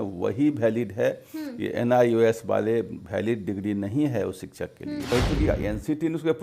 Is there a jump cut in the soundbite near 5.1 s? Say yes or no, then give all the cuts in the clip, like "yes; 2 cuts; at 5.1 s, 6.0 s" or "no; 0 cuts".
yes; 1 cut; at 5.1 s